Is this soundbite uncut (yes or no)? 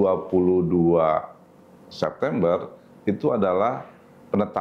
yes